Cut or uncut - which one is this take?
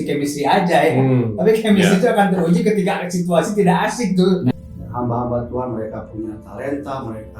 cut